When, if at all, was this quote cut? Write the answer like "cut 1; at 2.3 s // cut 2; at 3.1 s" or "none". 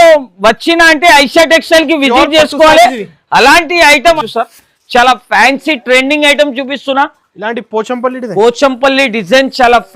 cut 1; at 4.2 s

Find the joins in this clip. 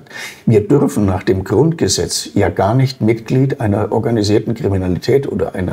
cut 1; at 3.9 s

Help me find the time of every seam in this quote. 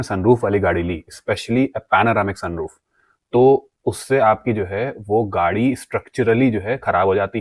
none

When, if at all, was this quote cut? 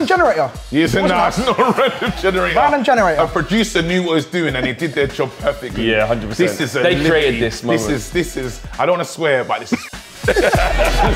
none

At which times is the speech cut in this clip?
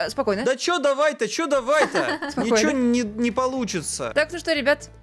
cut 1; at 2.7 s // cut 2; at 4.1 s

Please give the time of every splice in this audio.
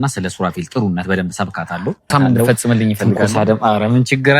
cut 1; at 2.1 s

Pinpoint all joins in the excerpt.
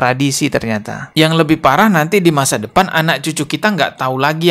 cut 1; at 0.9 s

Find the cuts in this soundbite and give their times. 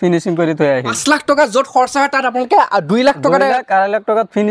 cut 1; at 1.0 s

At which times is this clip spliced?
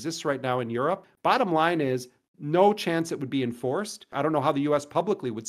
cut 1; at 1.1 s // cut 2; at 4.1 s

